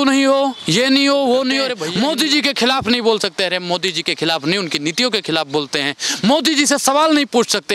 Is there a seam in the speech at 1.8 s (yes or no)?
yes